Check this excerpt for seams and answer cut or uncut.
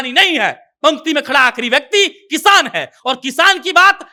uncut